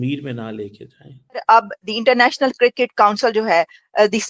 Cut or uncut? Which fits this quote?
cut